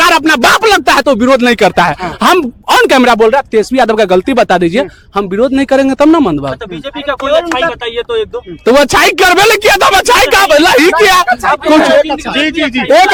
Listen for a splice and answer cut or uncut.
uncut